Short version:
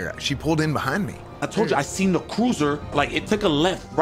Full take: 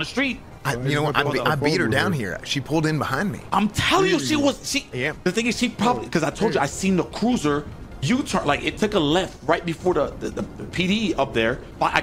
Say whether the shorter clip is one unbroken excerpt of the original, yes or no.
no